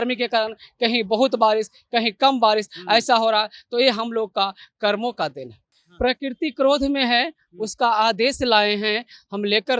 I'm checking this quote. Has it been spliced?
yes; 1 cut; at 5.8 s

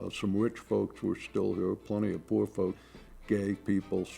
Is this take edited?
yes; 1 cut; at 2.8 s

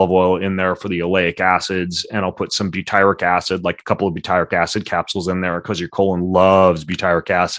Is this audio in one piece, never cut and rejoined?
yes; 0 cuts

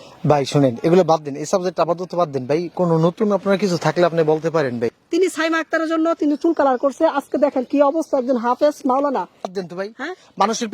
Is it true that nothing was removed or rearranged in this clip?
no; 2 cuts; at 5.0 s, 9.5 s

